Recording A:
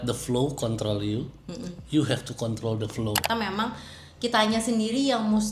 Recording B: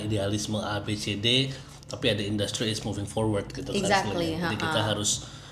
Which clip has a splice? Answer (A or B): A